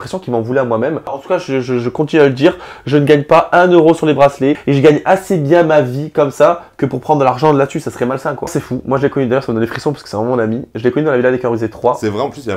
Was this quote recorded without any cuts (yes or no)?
no